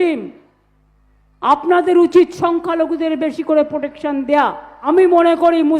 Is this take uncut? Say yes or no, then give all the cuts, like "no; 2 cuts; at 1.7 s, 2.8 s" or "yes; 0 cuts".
no; 1 cut; at 4.7 s